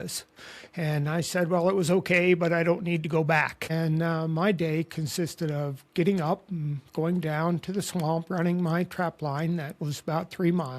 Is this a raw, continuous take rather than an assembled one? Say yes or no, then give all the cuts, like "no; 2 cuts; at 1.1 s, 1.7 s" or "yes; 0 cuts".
no; 1 cut; at 3.6 s